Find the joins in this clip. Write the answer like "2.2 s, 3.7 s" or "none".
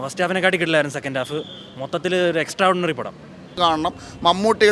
3.6 s